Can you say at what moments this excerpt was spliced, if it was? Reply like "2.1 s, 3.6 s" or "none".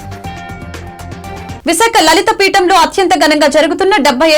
1.0 s